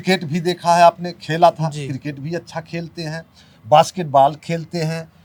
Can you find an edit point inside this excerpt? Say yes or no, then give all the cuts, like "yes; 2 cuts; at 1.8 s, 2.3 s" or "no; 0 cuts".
no; 0 cuts